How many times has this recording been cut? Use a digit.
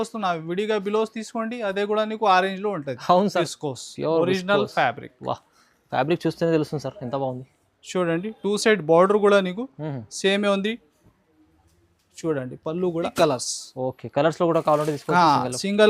2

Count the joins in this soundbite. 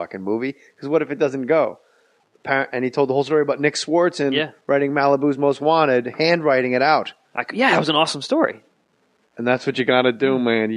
1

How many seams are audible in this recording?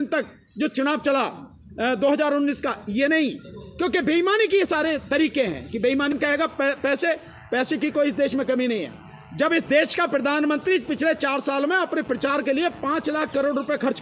1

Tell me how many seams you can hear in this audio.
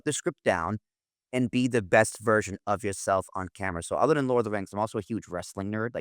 0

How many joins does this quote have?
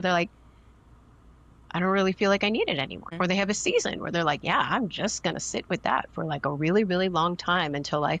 1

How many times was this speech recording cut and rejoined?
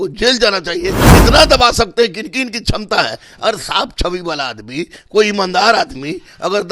1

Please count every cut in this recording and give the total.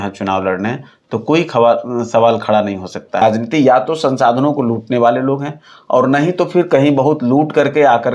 1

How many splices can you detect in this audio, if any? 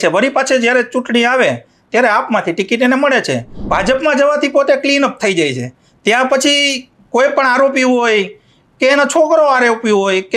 1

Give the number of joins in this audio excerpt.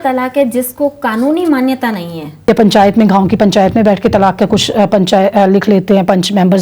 1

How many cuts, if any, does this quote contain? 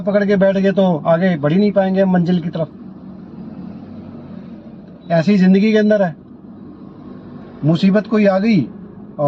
0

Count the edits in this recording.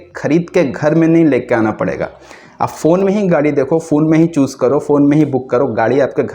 0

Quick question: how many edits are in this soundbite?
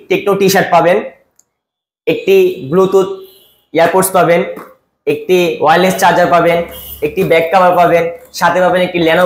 0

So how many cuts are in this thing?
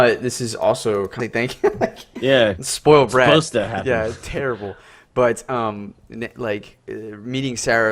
0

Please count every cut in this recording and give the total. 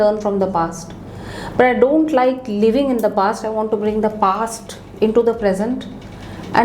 0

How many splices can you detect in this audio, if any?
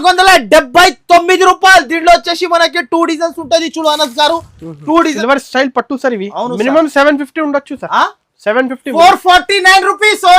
1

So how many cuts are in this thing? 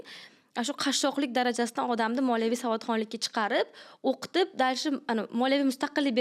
0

